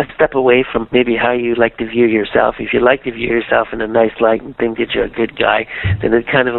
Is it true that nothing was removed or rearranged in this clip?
yes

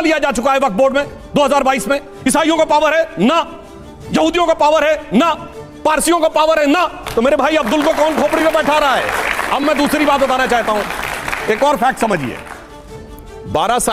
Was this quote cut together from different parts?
no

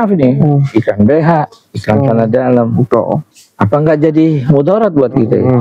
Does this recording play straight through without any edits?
yes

